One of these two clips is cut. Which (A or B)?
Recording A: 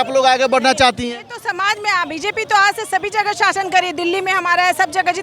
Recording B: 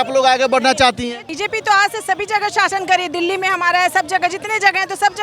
B